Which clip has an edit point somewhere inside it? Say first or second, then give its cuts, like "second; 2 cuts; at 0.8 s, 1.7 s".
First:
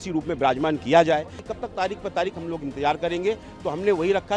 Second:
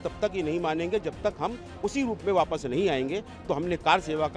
first; 1 cut; at 1.5 s